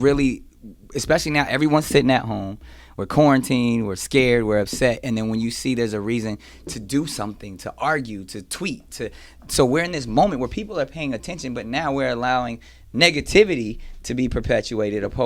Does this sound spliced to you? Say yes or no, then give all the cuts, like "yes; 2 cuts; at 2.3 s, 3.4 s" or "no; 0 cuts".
no; 0 cuts